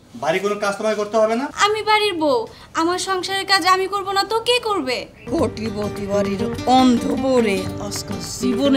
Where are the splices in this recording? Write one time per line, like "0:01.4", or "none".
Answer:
0:01.5
0:05.2